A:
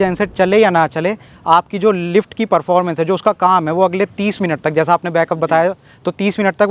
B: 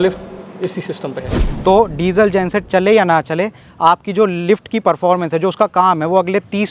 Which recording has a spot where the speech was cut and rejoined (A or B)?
B